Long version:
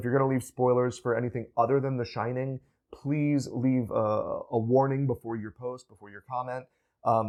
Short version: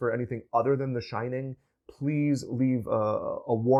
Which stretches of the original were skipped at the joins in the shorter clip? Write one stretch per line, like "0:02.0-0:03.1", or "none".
none